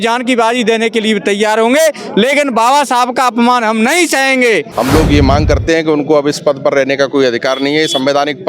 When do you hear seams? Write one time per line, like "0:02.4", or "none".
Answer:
0:04.7